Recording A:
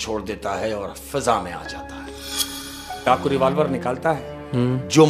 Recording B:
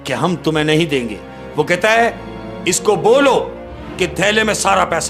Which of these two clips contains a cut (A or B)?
A